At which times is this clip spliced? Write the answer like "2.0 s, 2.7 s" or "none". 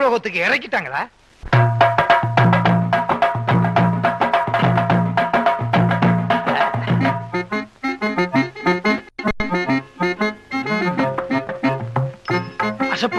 7.1 s